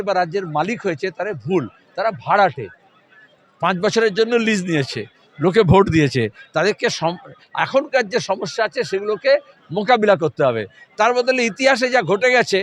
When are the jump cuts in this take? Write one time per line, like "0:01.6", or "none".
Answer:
none